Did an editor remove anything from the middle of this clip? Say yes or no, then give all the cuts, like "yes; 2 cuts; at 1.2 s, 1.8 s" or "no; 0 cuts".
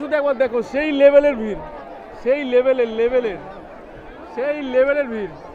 no; 0 cuts